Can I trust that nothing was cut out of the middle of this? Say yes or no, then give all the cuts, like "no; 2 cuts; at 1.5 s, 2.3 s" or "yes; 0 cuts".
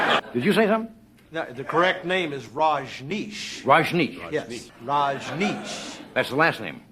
no; 1 cut; at 4.6 s